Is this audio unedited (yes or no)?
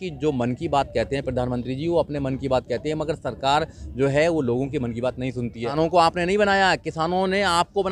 no